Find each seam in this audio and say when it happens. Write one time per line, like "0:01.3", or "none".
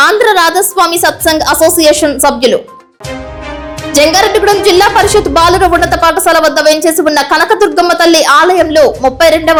none